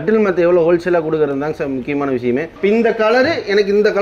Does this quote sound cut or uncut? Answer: cut